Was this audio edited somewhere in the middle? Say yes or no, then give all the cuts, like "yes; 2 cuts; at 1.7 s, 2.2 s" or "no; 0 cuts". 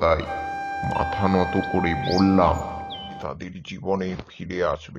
yes; 1 cut; at 3.2 s